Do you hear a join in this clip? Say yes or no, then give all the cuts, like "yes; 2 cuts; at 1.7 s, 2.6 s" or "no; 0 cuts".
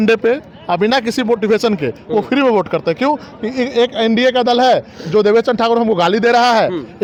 no; 0 cuts